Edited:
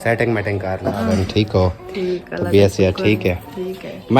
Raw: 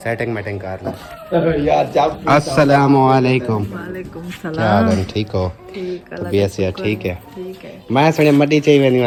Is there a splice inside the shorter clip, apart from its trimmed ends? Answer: yes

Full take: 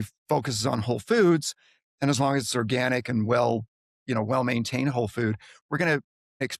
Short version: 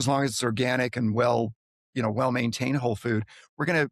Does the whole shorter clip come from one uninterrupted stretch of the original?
yes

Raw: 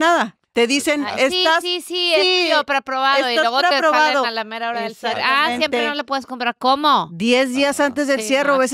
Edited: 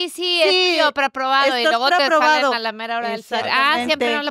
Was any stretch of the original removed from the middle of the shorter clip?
no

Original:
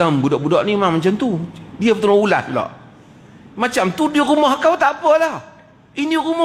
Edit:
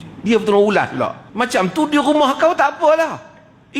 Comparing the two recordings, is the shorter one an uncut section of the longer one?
no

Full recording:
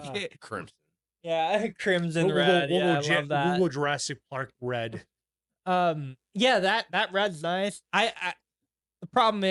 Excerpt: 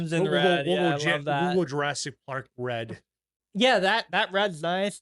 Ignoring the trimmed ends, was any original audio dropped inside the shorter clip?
yes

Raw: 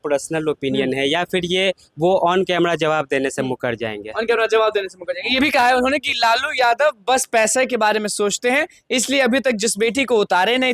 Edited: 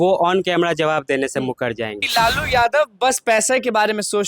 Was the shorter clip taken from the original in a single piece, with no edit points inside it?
no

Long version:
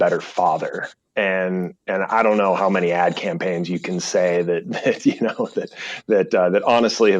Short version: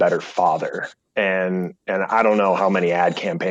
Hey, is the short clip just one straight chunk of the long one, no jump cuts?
yes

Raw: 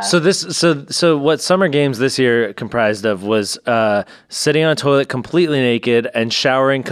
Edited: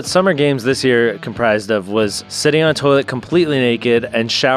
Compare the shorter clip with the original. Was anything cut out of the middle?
yes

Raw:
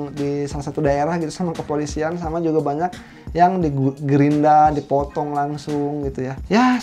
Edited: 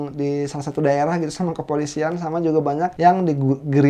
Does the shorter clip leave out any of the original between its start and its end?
yes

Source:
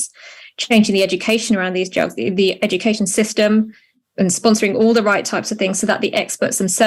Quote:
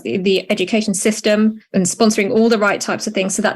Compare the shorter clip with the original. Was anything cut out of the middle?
yes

